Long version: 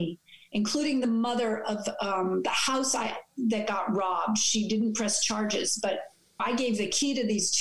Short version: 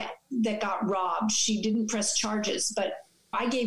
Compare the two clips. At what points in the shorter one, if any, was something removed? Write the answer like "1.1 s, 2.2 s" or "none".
none